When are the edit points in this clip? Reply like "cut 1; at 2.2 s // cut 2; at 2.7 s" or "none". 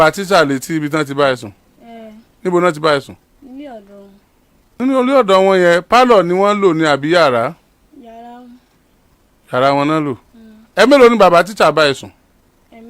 cut 1; at 4.8 s